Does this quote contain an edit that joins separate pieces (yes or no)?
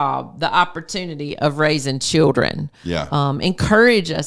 no